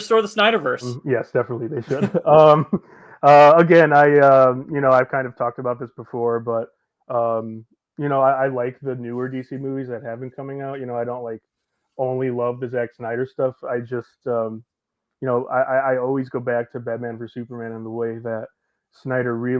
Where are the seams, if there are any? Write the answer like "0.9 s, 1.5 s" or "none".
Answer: 0.9 s

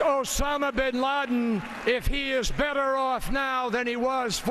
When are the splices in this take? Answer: none

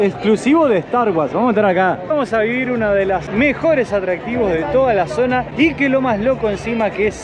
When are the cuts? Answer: 2.1 s

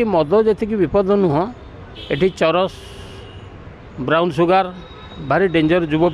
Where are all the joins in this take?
none

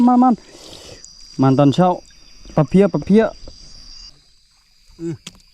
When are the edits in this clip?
4.1 s

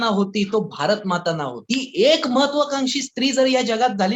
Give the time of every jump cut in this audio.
1.6 s

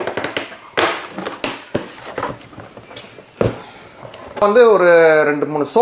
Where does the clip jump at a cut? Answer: 2.0 s, 4.4 s

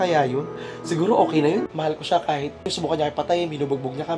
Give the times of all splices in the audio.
1.7 s

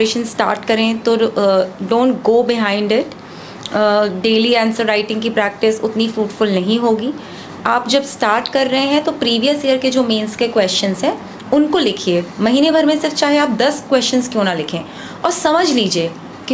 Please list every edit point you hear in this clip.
none

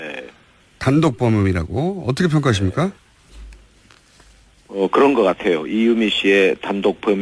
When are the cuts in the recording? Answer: none

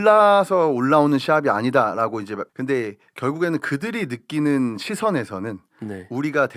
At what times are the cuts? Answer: 2.4 s

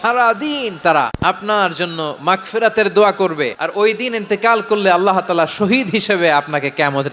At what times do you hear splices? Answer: 1.1 s, 3.6 s

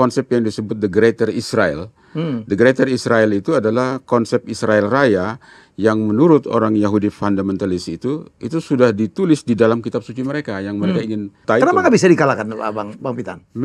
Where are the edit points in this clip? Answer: 11.3 s

